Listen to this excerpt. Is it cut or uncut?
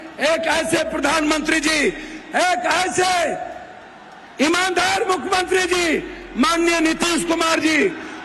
uncut